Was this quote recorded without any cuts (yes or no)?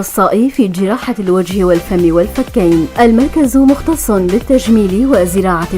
no